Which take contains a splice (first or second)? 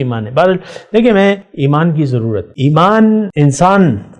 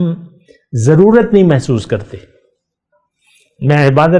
first